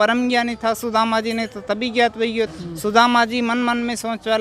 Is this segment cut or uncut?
cut